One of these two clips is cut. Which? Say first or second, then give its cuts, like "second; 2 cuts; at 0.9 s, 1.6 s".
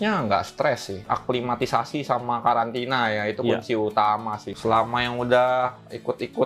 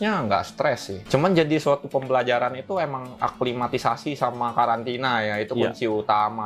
first; 2 cuts; at 0.9 s, 4.4 s